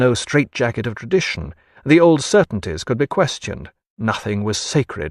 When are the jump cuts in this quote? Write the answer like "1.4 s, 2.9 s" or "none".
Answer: none